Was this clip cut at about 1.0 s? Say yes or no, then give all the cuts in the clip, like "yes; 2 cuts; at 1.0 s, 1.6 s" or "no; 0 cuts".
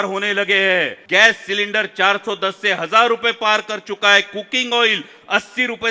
yes; 1 cut; at 1.0 s